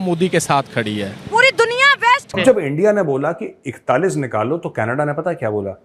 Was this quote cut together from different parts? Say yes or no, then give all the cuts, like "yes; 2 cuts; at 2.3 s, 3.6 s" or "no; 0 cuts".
yes; 1 cut; at 2.4 s